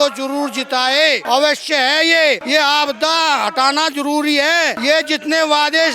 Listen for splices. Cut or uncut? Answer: cut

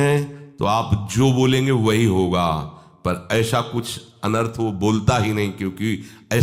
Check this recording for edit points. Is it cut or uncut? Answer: uncut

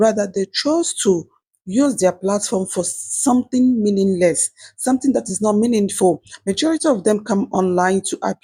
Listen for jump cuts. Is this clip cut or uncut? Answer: uncut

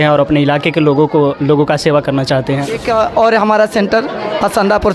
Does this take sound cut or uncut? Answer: cut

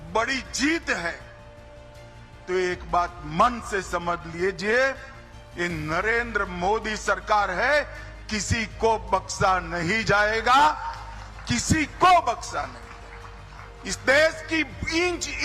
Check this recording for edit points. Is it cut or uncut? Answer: uncut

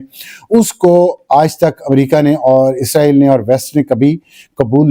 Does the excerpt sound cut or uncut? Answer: uncut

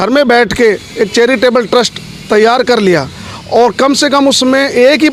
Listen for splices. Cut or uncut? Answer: uncut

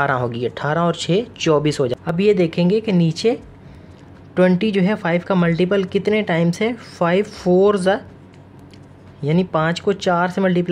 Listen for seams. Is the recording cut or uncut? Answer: cut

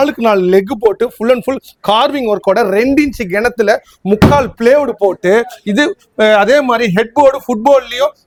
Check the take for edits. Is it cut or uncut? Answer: uncut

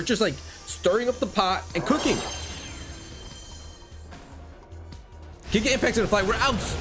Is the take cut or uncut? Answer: uncut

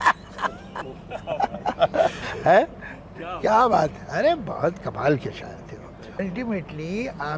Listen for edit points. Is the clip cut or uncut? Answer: cut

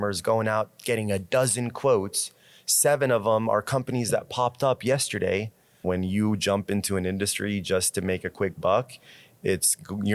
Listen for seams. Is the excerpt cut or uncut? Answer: cut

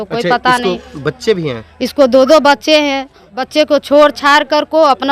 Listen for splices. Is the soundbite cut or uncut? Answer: cut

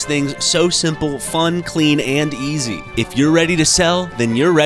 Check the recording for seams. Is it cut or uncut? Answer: cut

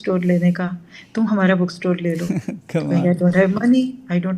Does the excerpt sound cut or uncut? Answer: uncut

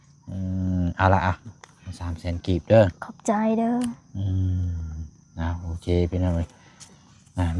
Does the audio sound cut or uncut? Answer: uncut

